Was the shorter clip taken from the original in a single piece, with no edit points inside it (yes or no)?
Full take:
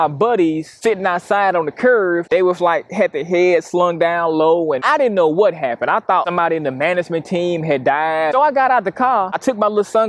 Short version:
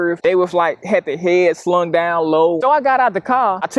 no